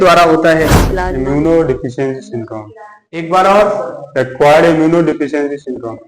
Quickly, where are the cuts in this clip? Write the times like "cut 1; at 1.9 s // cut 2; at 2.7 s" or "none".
cut 1; at 1.2 s

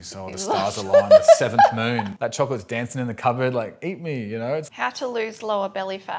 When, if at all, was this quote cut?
cut 1; at 2.1 s // cut 2; at 4.7 s

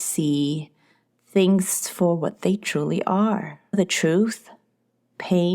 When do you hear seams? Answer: cut 1; at 3.6 s

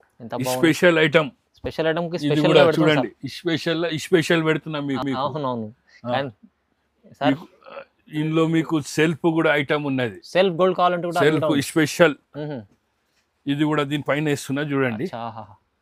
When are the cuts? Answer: none

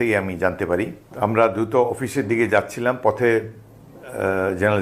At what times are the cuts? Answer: cut 1; at 1.0 s

